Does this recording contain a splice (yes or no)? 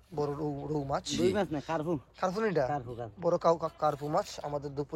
no